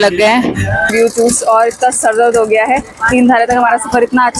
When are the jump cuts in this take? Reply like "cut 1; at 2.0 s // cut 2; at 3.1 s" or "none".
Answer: cut 1; at 0.9 s